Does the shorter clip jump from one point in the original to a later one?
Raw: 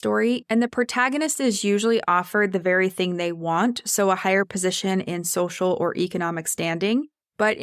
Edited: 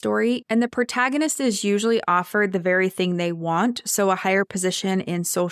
no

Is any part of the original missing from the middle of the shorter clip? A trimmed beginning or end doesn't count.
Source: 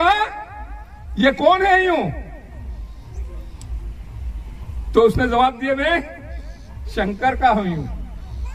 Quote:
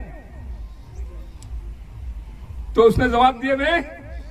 no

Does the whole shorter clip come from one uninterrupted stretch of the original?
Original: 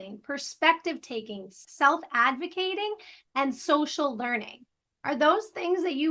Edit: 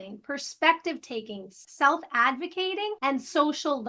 no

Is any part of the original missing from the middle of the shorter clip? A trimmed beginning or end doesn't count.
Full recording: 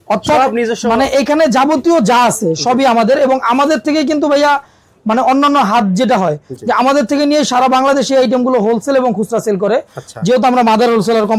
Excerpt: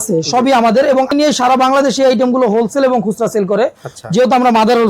yes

